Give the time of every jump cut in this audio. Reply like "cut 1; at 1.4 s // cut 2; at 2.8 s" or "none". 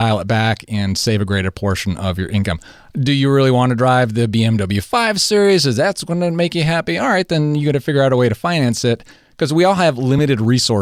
none